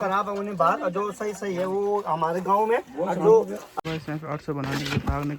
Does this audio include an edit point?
yes; 1 cut; at 3.6 s

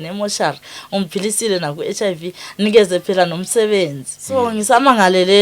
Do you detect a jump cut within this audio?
yes; 1 cut; at 4.4 s

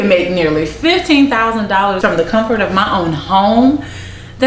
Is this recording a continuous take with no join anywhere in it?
no; 1 cut; at 2.0 s

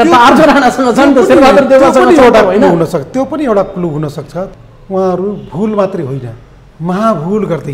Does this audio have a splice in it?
yes; 1 cut; at 4.5 s

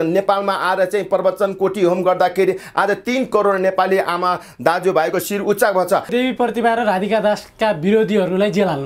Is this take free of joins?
no; 1 cut; at 6.1 s

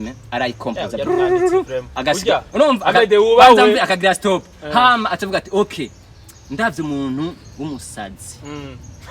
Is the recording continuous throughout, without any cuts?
yes; 0 cuts

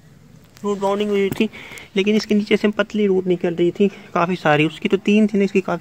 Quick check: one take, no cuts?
yes; 0 cuts

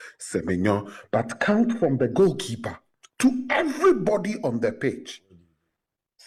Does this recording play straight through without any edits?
yes; 0 cuts

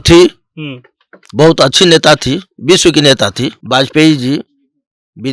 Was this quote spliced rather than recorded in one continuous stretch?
yes; 1 cut; at 3.6 s

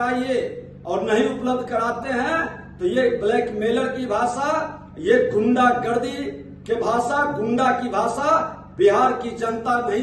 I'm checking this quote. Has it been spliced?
no; 0 cuts

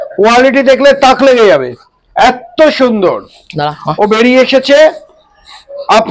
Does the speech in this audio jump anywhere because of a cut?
no; 0 cuts

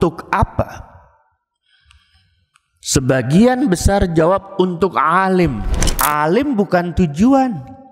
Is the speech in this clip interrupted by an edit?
yes; 1 cut; at 5.8 s

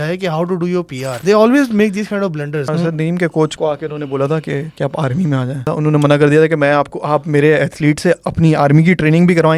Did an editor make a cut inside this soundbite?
yes; 5 cuts; at 1.1 s, 2.7 s, 3.5 s, 4.7 s, 5.7 s

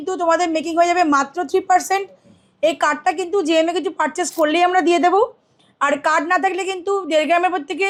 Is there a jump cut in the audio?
no; 0 cuts

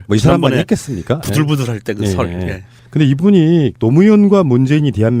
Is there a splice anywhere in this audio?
no; 0 cuts

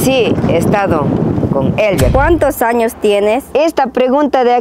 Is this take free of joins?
no; 2 cuts; at 2.1 s, 3.4 s

